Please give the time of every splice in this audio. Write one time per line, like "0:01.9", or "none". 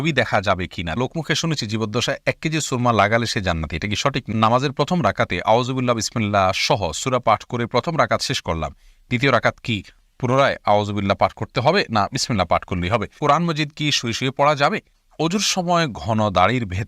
0:01.0
0:04.2
0:13.1
0:15.0